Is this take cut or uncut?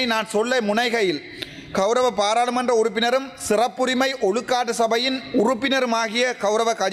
uncut